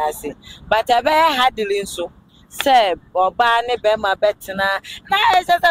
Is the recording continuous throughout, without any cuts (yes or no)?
yes